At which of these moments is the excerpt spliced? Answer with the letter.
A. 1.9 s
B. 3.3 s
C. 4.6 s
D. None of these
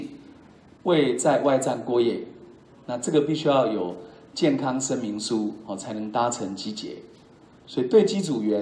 D